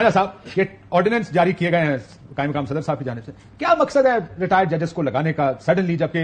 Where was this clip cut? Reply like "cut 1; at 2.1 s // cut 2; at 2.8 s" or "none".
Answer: none